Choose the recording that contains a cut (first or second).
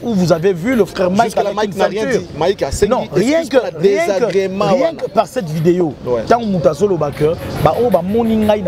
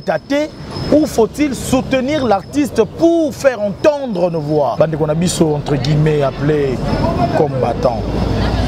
second